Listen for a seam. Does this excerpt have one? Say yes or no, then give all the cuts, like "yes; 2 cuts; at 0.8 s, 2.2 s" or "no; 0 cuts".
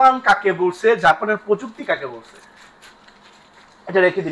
no; 0 cuts